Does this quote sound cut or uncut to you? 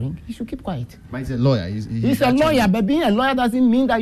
uncut